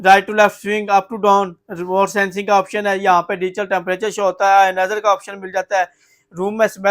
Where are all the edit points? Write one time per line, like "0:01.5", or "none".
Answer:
none